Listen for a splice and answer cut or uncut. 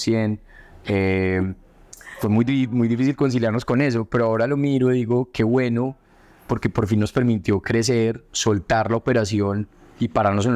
uncut